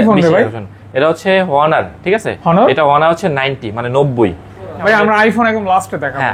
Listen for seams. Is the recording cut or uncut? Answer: cut